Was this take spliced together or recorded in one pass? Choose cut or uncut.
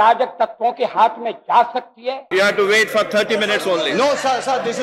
cut